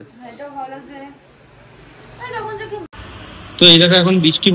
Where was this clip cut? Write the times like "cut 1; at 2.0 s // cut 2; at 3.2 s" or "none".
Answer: cut 1; at 2.9 s